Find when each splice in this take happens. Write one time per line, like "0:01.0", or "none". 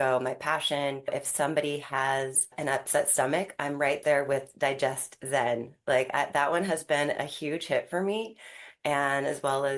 0:01.1
0:02.5